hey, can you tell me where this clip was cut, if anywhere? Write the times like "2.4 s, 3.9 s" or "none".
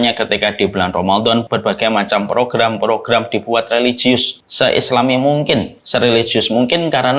1.5 s, 4.4 s, 5.8 s